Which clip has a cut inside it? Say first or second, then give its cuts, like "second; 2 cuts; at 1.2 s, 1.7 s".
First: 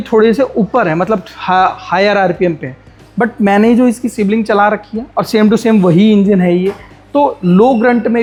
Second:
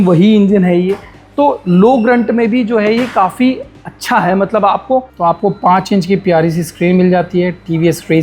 second; 1 cut; at 5.1 s